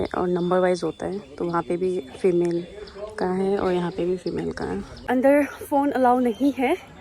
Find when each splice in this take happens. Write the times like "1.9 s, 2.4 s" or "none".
5.1 s